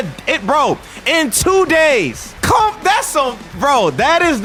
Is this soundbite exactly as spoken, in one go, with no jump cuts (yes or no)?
yes